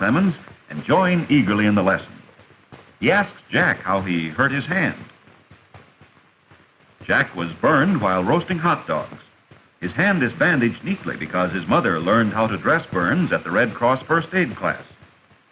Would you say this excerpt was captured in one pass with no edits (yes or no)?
no